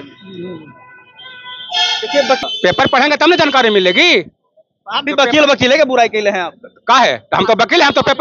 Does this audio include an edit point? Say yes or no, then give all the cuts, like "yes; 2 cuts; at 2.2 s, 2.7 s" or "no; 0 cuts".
yes; 1 cut; at 2.4 s